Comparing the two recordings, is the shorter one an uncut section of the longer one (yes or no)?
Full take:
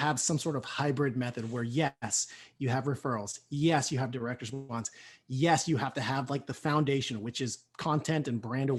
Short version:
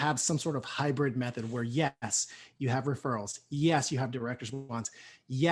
yes